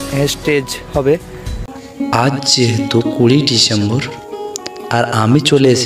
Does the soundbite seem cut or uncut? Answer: cut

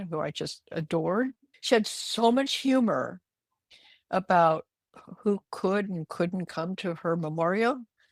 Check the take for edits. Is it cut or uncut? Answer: uncut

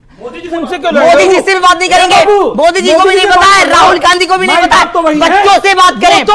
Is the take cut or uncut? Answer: uncut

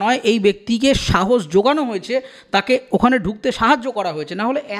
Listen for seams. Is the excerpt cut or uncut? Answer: uncut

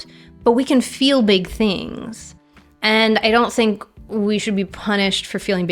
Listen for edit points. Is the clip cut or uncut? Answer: uncut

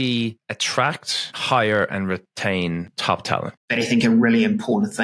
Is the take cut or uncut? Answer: cut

